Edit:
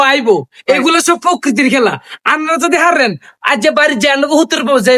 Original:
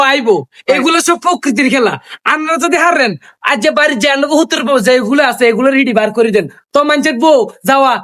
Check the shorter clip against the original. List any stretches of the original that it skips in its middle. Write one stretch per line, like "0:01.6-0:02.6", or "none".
none